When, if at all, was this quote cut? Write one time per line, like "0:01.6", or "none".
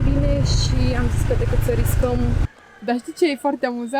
0:02.5